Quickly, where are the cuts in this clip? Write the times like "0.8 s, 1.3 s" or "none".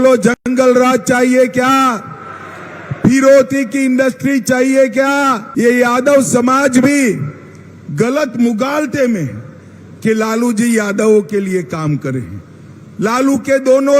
5.4 s